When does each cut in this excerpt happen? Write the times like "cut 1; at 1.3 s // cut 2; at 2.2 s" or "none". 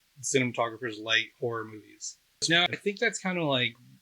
cut 1; at 2.5 s